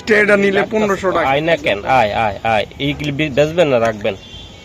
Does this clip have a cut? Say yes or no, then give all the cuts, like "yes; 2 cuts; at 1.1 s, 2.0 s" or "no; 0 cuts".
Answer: yes; 1 cut; at 1.3 s